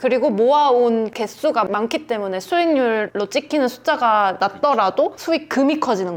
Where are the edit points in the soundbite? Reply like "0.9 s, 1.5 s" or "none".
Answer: 1.1 s, 3.1 s, 4.4 s